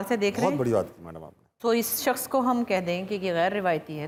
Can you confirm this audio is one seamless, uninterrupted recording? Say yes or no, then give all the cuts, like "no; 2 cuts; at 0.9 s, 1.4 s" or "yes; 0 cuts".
yes; 0 cuts